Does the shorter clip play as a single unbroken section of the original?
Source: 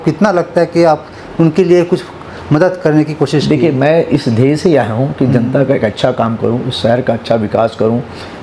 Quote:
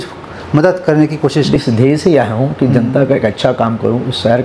no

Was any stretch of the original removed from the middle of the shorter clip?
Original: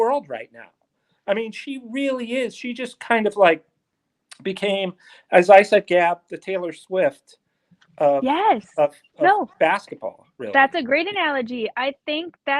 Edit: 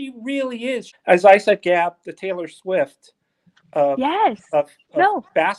yes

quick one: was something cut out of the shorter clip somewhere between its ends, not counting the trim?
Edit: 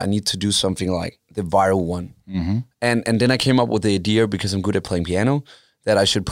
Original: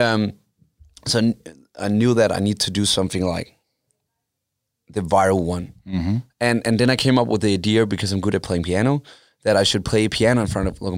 yes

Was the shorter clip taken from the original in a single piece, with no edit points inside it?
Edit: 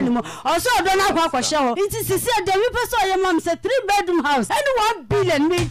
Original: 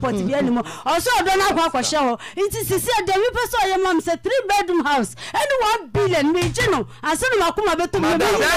no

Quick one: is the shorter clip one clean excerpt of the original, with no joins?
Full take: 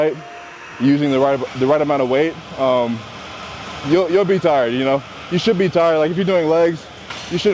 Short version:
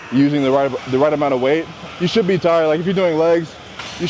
no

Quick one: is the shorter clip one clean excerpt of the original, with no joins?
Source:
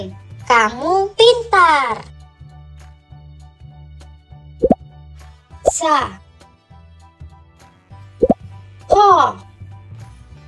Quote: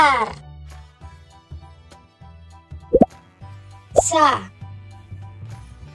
no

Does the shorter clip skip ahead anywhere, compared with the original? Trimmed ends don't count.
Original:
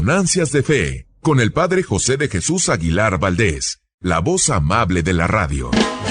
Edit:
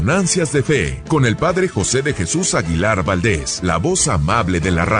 yes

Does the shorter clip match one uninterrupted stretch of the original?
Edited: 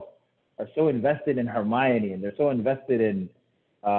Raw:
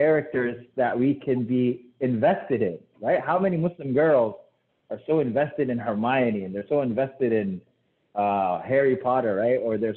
yes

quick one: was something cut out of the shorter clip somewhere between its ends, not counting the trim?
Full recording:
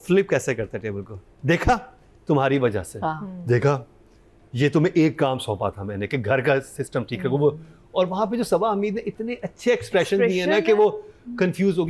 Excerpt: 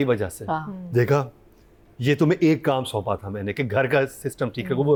no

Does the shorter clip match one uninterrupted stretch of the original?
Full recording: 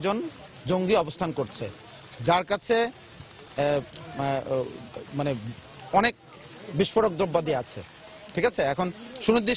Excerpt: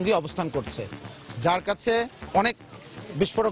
no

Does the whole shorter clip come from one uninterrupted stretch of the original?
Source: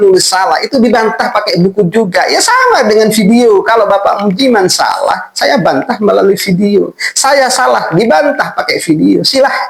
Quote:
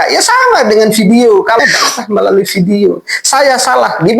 no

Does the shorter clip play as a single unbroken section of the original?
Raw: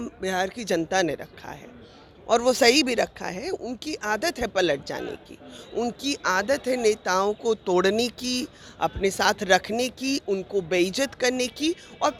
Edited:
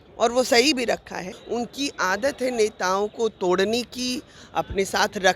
no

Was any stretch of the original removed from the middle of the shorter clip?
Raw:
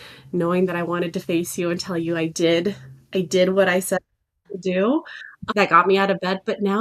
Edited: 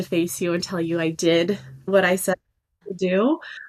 yes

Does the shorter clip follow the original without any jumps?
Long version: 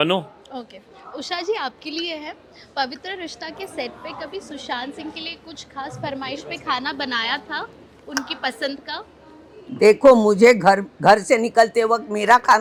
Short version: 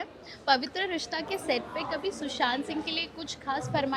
yes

